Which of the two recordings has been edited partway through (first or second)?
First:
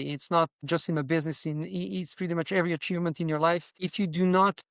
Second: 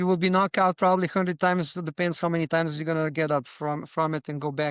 first